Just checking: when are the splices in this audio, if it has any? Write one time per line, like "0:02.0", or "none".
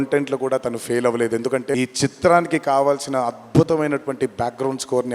0:01.7